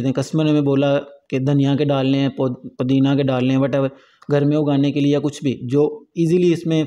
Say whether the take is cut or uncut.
uncut